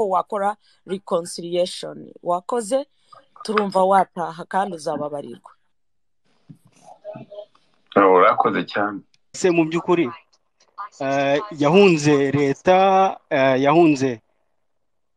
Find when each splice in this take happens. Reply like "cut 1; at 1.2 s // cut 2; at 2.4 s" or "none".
cut 1; at 9.3 s